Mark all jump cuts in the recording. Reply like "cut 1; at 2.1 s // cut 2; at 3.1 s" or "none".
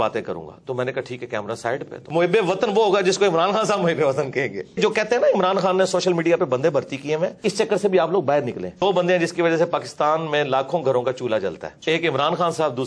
cut 1; at 2.0 s // cut 2; at 4.8 s // cut 3; at 7.4 s // cut 4; at 8.8 s // cut 5; at 11.7 s